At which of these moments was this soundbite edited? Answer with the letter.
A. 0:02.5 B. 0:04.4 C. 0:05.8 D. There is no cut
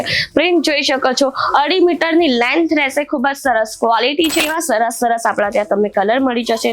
B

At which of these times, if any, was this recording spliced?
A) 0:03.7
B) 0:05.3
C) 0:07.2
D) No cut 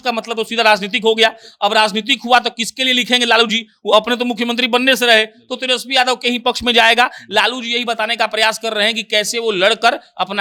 D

